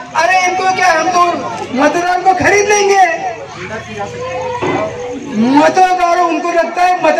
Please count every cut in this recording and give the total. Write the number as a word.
zero